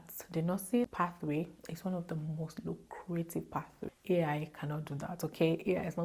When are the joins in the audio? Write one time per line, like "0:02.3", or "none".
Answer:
0:00.9
0:03.9